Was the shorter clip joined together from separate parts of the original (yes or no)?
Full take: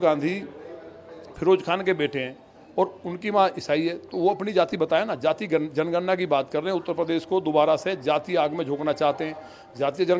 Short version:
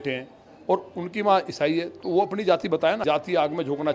yes